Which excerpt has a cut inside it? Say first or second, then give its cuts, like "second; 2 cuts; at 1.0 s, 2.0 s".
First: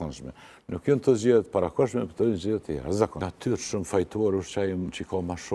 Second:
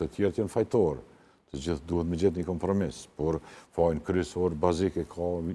first; 1 cut; at 3.3 s